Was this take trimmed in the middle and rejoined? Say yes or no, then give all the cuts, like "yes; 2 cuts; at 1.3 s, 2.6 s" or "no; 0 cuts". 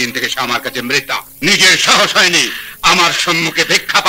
yes; 1 cut; at 1.3 s